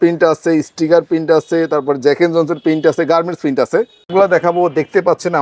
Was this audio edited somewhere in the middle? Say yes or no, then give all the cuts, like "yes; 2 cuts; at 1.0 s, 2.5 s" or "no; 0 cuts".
yes; 1 cut; at 4.1 s